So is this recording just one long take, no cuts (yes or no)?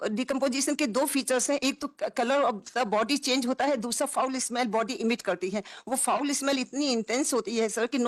yes